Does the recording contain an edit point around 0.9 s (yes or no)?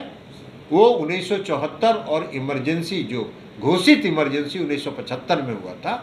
no